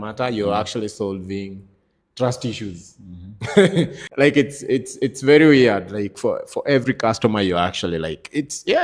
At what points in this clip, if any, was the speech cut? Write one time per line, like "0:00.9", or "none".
0:04.0